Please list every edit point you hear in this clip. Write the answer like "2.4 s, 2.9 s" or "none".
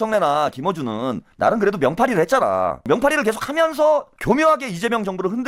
1.3 s, 2.9 s, 4.1 s